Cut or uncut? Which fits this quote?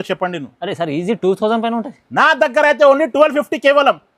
uncut